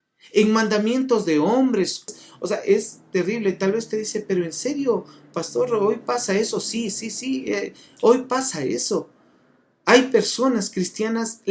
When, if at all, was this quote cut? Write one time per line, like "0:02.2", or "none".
0:02.2

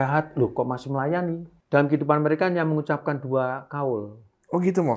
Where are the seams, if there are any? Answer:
0:01.5

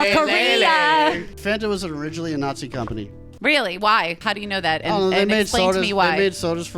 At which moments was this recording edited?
0:01.4
0:04.2

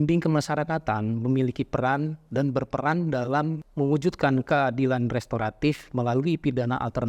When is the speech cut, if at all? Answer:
0:03.6

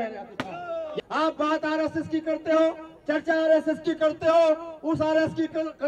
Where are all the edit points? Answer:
0:00.9

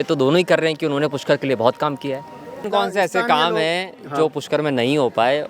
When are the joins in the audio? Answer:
0:02.6

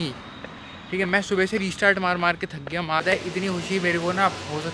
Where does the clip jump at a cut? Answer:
0:03.0

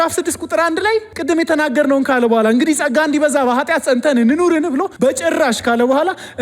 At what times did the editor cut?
0:01.1
0:04.9

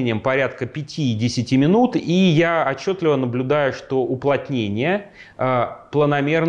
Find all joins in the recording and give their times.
none

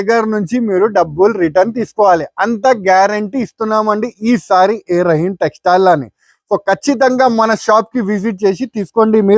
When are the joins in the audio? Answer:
none

